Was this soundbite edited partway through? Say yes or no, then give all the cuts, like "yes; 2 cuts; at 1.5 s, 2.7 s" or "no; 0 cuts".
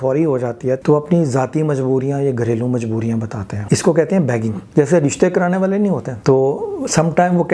yes; 4 cuts; at 0.8 s, 3.5 s, 4.6 s, 6.1 s